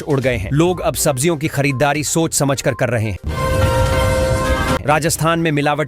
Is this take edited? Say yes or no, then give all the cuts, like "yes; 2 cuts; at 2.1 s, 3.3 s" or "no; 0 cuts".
yes; 2 cuts; at 3.2 s, 4.8 s